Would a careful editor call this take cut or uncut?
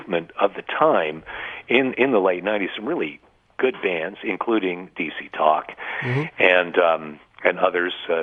uncut